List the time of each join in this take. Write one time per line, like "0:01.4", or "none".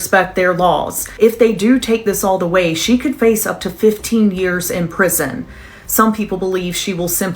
0:01.0